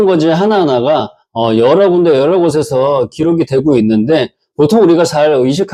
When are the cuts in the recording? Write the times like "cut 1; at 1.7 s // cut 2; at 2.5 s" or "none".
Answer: none